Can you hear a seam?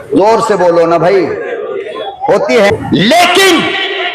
yes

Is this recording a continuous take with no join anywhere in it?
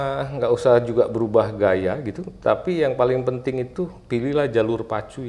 yes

